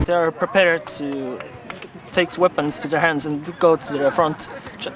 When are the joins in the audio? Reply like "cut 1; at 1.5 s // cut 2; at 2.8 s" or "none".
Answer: none